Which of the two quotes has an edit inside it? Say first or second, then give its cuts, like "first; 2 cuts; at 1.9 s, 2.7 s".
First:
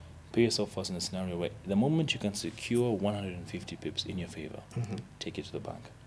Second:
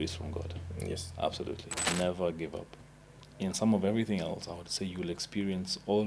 second; 1 cut; at 1.7 s